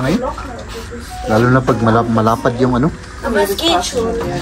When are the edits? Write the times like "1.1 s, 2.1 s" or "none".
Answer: none

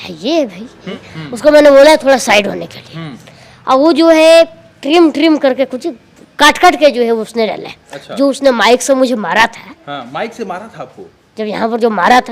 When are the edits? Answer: 1.0 s

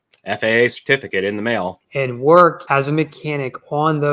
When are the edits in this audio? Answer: 1.8 s, 2.6 s

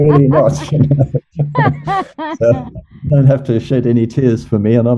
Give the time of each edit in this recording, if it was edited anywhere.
none

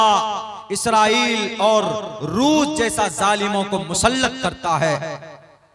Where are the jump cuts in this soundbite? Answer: none

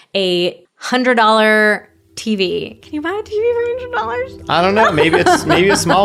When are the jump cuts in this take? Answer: none

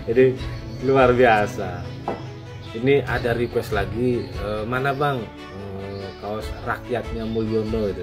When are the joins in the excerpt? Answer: none

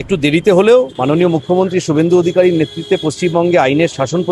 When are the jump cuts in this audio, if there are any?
0.9 s

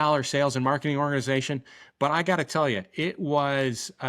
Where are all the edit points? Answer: none

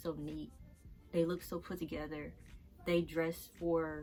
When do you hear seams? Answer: none

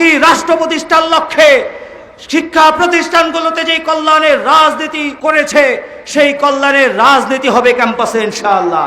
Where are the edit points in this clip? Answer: 5.0 s

